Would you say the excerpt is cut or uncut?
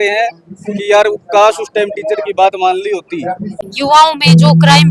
cut